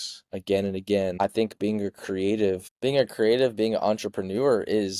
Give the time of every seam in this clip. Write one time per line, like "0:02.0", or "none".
0:01.2
0:02.7